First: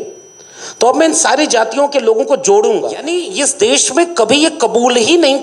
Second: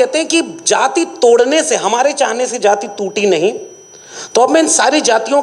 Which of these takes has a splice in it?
first; 1 cut; at 3.2 s

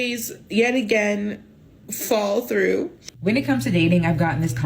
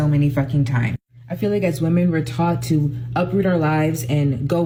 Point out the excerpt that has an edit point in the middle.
first; 1 cut; at 3.0 s

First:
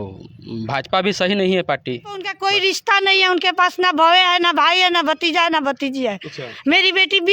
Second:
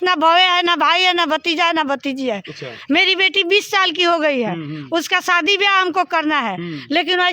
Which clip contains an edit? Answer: first; 1 cut; at 2.3 s

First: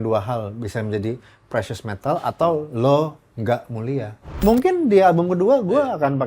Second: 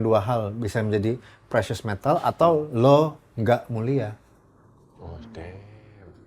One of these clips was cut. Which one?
first; 1 cut; at 4.4 s

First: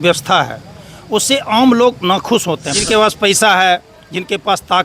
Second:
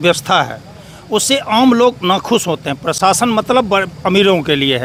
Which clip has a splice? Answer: first; 1 cut; at 2.7 s

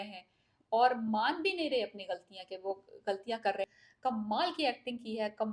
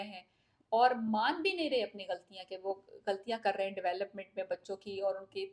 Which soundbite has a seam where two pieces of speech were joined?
first; 1 cut; at 3.7 s

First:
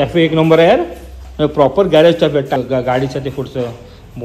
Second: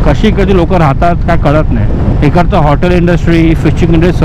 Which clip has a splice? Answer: first; 1 cut; at 2.6 s

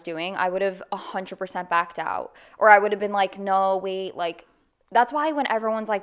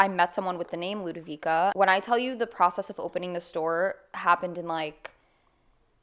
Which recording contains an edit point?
second; 1 cut; at 1.8 s

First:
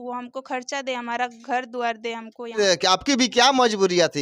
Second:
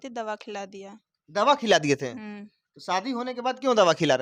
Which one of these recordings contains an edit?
first; 1 cut; at 2.6 s

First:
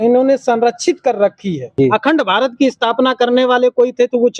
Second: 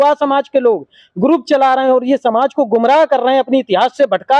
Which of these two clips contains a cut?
first; 1 cut; at 1.7 s

